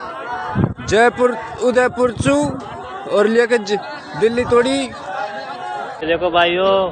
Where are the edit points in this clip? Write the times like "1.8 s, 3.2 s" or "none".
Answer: none